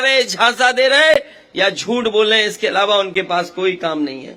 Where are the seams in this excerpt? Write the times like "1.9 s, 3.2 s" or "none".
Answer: none